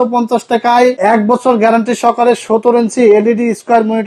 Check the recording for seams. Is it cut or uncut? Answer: cut